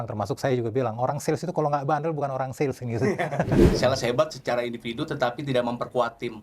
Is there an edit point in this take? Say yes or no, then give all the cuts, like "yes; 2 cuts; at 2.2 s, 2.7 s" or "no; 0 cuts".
yes; 1 cut; at 3.7 s